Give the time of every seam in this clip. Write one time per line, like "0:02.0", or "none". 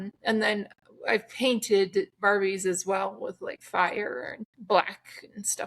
0:03.5
0:04.5